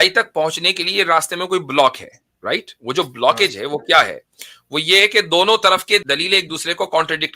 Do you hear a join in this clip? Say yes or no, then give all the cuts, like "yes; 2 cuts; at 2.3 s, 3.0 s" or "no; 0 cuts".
yes; 1 cut; at 6.0 s